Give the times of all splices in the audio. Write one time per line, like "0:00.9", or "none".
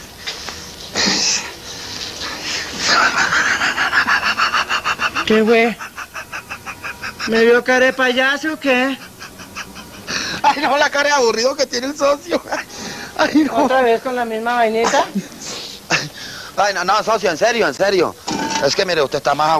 0:04.7